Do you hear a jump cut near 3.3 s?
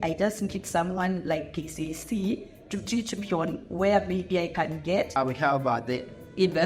no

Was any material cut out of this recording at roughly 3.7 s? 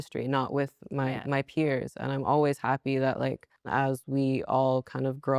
yes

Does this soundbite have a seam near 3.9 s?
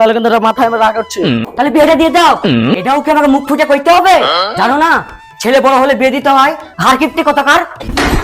no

